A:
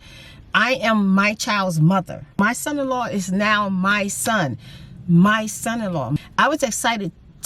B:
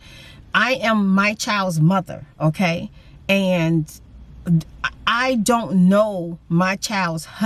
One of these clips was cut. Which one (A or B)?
A